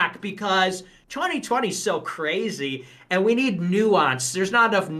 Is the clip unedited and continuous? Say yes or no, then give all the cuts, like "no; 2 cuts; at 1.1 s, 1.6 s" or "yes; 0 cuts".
yes; 0 cuts